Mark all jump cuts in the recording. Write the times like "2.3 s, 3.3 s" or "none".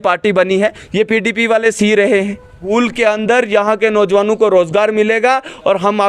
2.7 s

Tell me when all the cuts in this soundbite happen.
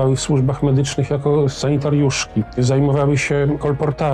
1.6 s, 2.5 s

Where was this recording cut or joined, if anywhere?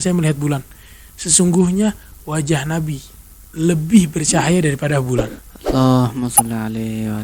none

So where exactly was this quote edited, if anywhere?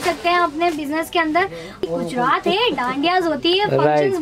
1.8 s

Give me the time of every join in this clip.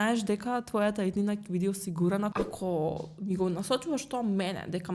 2.3 s

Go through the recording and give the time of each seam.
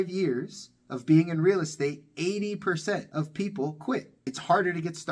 4.1 s

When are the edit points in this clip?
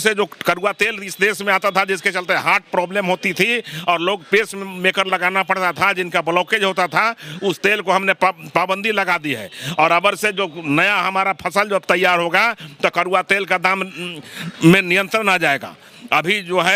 none

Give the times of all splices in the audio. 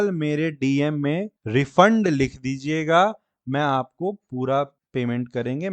1.3 s, 4.8 s

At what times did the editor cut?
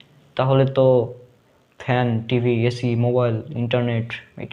none

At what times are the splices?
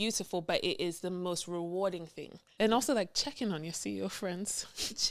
2.5 s

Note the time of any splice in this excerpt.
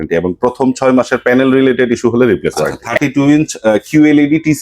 2.9 s

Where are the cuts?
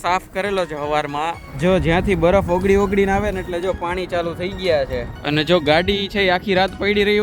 1.5 s, 5.1 s

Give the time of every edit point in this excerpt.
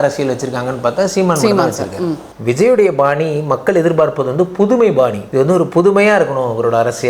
2.3 s, 5.2 s

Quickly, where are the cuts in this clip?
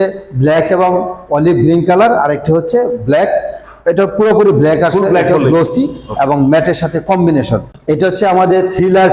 7.7 s

